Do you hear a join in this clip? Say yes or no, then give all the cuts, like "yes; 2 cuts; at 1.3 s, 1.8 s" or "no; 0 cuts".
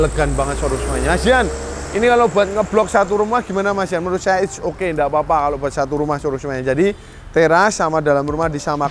no; 0 cuts